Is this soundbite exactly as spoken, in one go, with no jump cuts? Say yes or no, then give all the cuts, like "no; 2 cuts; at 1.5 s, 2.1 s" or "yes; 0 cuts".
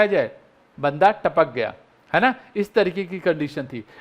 yes; 0 cuts